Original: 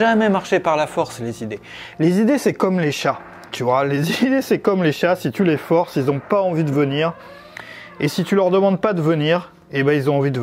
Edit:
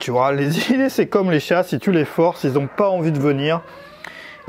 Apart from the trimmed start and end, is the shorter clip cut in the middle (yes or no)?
no